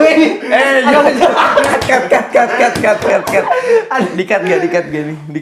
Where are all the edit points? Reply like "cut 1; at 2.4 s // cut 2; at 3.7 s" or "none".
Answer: none